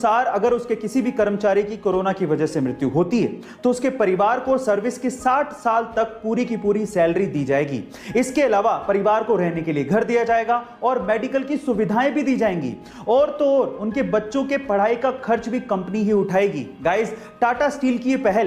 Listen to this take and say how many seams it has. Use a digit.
0